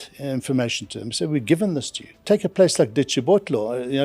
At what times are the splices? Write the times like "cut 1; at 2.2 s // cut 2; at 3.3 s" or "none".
cut 1; at 2.2 s

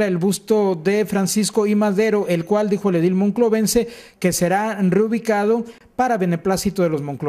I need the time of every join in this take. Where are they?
none

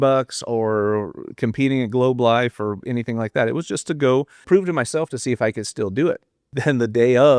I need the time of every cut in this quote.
cut 1; at 4.4 s // cut 2; at 6.4 s

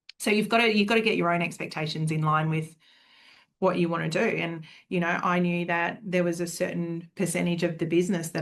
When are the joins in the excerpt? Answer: none

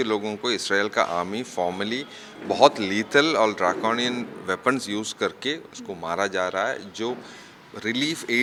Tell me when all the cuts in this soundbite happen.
none

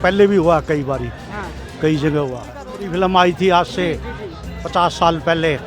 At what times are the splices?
cut 1; at 2.8 s

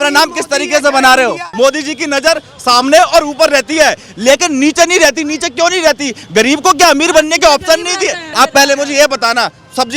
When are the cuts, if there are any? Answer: cut 1; at 1.5 s // cut 2; at 8.2 s

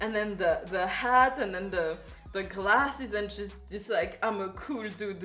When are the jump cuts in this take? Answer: none

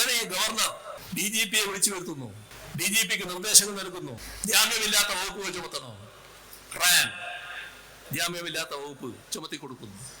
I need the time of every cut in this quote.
cut 1; at 1.0 s // cut 2; at 2.5 s // cut 3; at 4.3 s

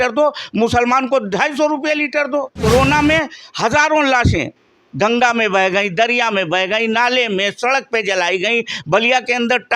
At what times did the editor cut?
cut 1; at 2.5 s

